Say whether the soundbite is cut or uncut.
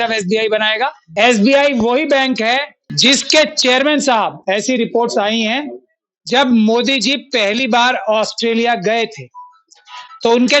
cut